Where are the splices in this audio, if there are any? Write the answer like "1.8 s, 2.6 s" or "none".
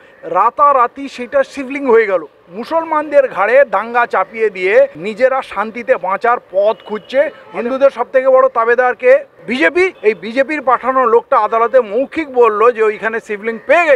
2.4 s, 5.0 s, 7.4 s, 9.9 s